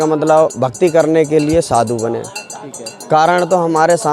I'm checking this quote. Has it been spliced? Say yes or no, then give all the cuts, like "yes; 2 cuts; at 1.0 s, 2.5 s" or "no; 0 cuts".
no; 0 cuts